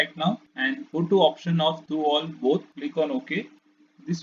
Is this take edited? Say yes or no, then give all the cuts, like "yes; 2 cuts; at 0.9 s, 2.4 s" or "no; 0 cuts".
no; 0 cuts